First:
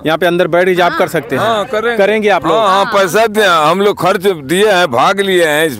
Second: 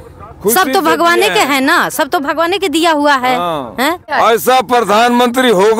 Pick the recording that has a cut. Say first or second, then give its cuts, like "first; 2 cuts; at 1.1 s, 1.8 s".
second; 1 cut; at 4.1 s